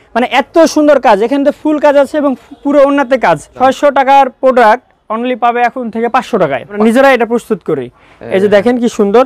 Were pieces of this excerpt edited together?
yes; 2 cuts; at 3.5 s, 6.7 s

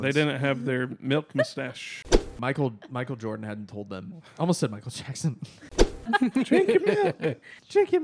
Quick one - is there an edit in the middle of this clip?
yes; 2 cuts; at 2.1 s, 6.1 s

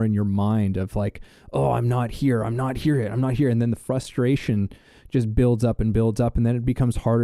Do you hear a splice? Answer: no; 0 cuts

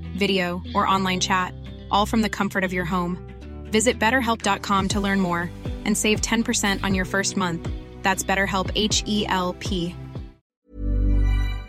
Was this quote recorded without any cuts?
no; 1 cut; at 10.6 s

